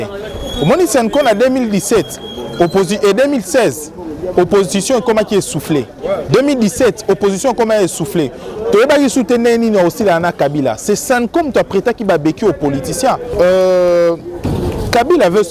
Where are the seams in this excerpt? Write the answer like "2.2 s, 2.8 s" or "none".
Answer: 13.3 s